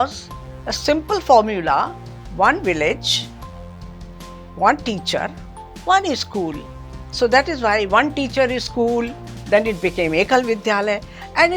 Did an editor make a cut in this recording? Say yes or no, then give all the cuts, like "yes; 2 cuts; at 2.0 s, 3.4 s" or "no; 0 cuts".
no; 0 cuts